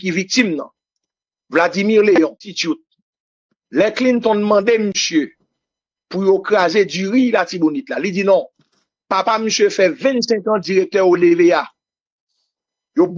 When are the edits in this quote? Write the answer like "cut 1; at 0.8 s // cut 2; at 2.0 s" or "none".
cut 1; at 2.5 s